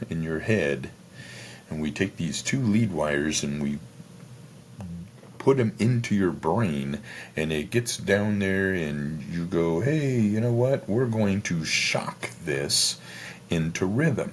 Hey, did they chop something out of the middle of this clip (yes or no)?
no